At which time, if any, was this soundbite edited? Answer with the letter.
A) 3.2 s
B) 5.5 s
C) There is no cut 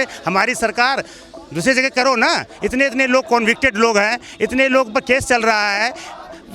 C